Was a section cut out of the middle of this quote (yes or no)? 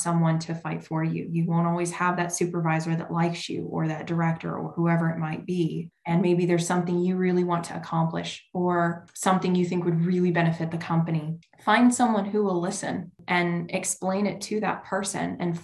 yes